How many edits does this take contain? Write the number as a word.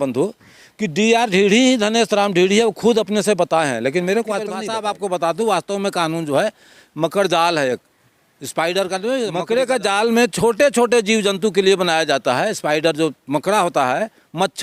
two